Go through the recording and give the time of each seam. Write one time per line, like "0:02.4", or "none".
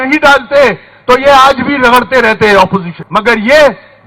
0:03.0